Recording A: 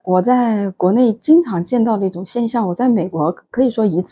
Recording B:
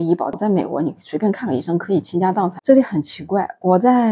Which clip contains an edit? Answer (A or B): B